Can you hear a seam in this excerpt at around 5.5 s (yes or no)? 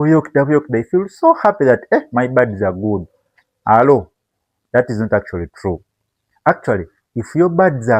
no